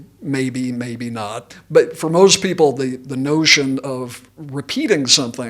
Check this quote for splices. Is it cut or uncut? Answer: cut